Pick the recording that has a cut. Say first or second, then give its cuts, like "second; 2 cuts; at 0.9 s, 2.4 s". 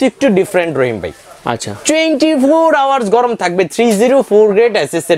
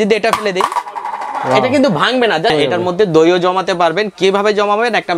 second; 1 cut; at 2.5 s